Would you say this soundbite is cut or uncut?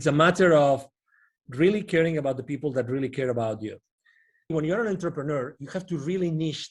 cut